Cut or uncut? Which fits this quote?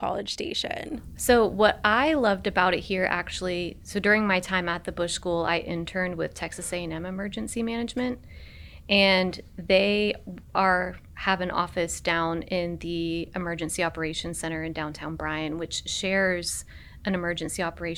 uncut